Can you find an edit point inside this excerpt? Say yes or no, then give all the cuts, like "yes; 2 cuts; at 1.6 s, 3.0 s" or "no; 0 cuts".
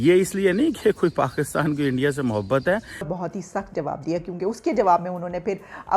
yes; 1 cut; at 3.1 s